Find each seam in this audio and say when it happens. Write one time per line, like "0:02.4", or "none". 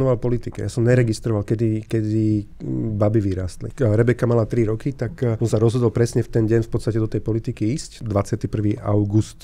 none